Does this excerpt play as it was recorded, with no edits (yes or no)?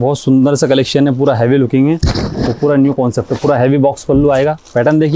yes